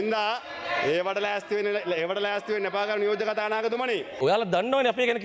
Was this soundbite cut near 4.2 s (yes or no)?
yes